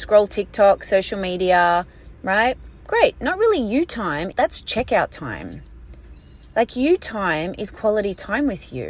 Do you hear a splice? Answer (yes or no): no